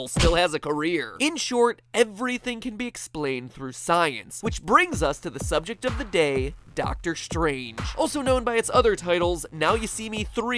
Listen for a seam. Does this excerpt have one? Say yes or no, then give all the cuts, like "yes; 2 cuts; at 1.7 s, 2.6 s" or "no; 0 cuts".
yes; 1 cut; at 1.2 s